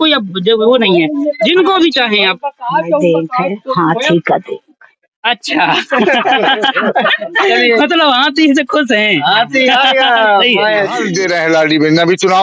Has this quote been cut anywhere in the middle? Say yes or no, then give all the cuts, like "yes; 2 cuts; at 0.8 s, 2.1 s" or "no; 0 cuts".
yes; 1 cut; at 11.0 s